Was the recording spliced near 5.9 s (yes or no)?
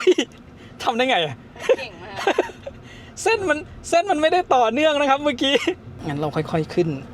yes